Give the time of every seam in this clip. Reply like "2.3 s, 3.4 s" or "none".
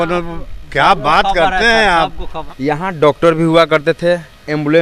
2.3 s